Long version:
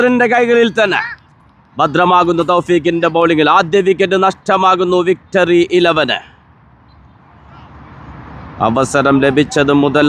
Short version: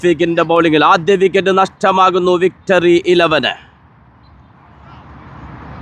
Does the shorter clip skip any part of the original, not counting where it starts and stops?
no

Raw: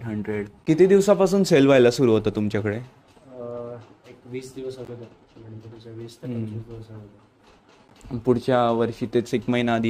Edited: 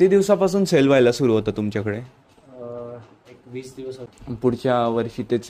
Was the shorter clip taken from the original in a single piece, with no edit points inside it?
no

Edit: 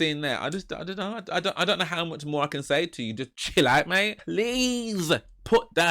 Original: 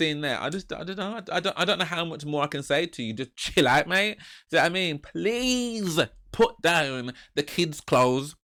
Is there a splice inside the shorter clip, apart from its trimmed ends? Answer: yes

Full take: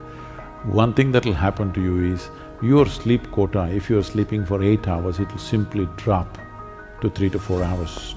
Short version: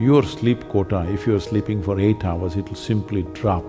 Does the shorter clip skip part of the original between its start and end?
no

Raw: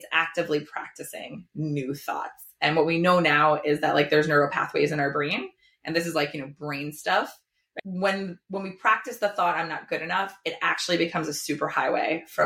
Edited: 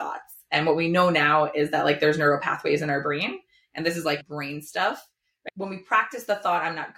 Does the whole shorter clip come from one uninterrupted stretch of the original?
no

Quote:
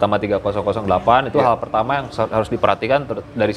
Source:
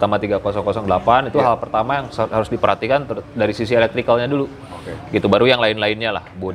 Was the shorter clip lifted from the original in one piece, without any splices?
yes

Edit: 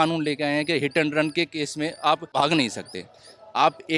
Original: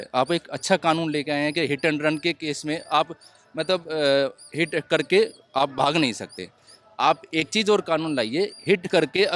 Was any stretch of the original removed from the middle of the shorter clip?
yes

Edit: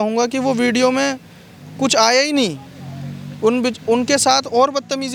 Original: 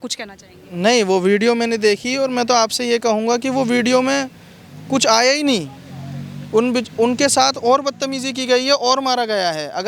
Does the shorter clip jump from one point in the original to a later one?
no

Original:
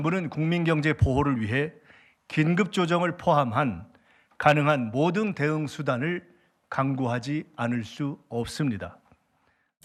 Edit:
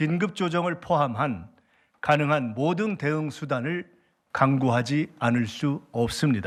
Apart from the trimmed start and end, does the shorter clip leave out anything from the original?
no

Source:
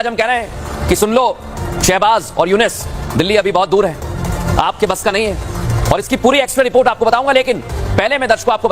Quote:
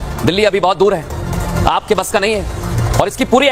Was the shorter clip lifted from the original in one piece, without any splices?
yes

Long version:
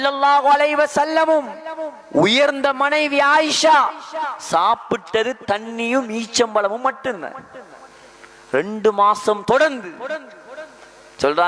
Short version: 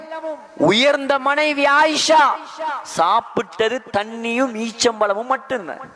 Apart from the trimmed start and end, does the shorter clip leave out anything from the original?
no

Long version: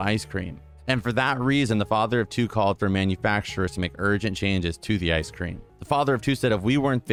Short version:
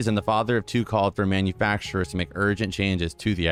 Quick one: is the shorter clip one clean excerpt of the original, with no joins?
yes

